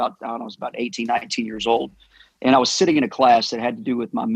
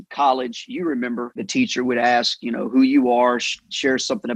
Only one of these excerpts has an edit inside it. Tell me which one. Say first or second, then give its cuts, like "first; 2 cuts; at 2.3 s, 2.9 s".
second; 1 cut; at 1.4 s